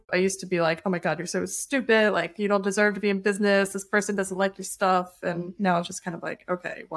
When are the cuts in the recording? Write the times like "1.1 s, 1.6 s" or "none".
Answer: none